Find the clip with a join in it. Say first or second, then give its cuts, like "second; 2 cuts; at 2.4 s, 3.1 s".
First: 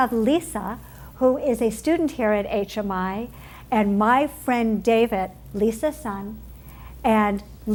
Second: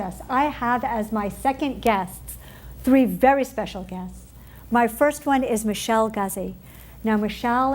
second; 1 cut; at 1.6 s